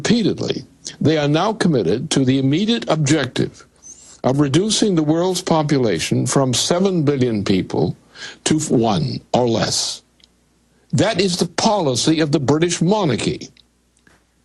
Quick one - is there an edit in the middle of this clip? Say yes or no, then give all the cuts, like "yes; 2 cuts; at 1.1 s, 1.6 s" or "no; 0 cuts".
no; 0 cuts